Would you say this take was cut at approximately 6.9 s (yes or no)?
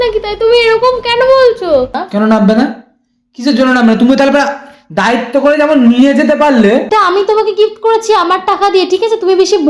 yes